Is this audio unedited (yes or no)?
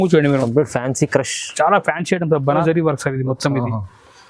no